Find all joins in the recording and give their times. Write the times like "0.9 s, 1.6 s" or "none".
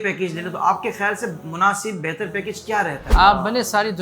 3.0 s